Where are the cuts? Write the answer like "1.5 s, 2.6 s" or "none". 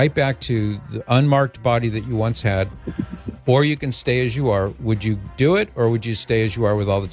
none